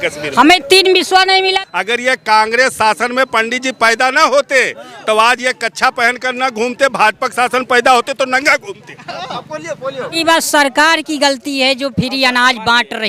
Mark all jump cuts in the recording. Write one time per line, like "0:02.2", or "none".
0:01.6
0:10.2